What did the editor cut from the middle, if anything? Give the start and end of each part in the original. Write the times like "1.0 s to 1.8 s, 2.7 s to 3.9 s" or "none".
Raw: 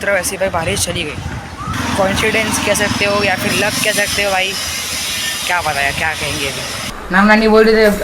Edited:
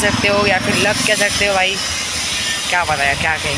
none